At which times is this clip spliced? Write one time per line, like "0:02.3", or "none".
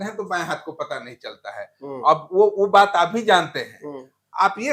none

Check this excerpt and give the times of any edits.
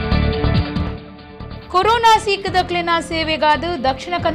none

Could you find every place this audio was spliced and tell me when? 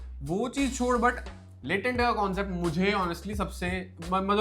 0:01.3

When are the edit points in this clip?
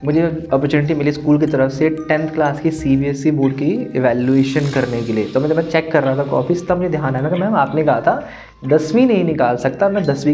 none

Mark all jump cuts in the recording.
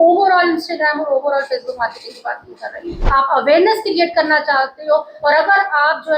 0:03.0

